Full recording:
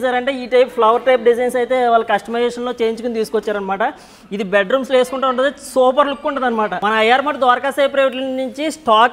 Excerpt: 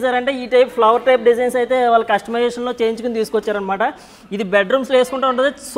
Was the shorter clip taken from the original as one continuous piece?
yes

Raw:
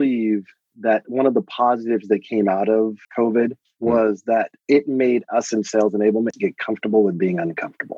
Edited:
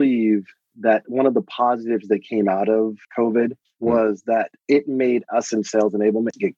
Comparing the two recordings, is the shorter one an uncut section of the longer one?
yes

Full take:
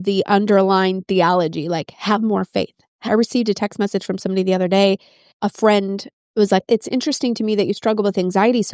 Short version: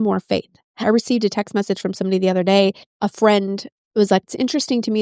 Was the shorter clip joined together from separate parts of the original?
yes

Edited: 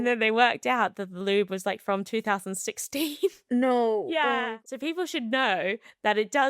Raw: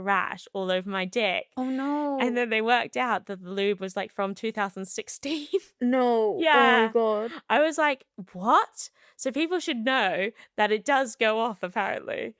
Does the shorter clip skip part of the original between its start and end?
yes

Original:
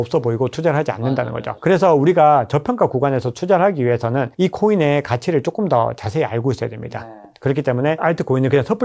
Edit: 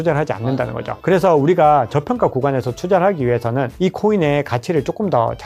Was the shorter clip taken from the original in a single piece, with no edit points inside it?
yes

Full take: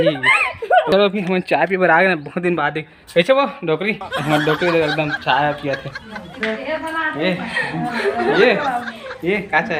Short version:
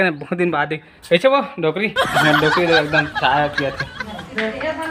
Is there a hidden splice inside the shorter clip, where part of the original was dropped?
no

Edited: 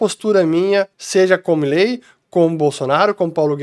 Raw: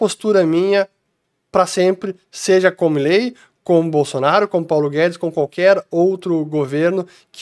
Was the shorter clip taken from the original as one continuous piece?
no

